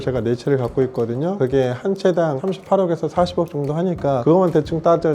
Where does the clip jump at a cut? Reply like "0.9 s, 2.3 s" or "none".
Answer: 4.2 s